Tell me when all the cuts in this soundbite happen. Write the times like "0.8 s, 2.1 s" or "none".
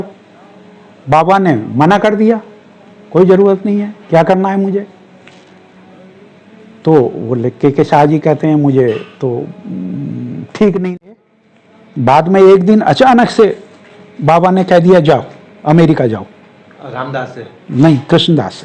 11.1 s